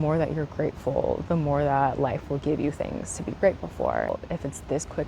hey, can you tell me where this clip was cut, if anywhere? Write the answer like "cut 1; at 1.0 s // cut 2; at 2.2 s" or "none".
cut 1; at 4.1 s